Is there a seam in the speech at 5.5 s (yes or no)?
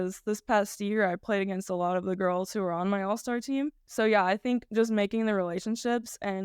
no